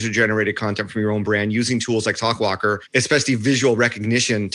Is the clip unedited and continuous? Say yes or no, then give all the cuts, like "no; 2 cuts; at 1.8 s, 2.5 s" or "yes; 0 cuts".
no; 1 cut; at 2.8 s